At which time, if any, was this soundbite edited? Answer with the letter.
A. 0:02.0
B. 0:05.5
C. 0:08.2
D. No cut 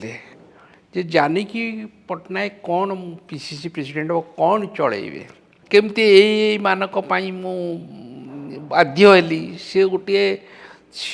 B